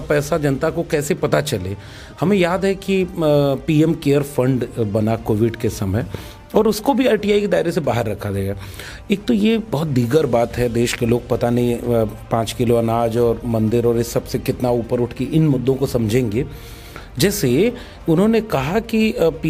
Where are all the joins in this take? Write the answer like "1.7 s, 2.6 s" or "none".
none